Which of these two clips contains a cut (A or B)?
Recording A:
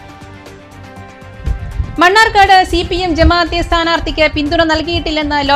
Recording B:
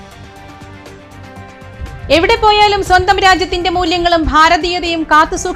A